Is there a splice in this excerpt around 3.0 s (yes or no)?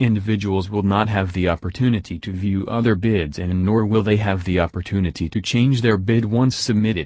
no